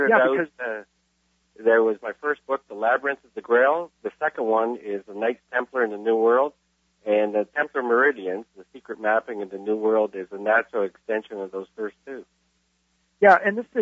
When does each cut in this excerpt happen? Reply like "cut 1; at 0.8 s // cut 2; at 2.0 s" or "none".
none